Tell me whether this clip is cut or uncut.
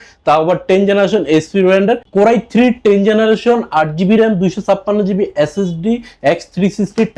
uncut